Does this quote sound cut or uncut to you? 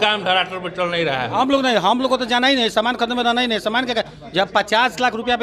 cut